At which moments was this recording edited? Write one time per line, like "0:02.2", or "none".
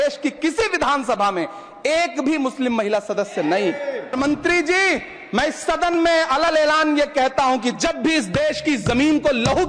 0:04.1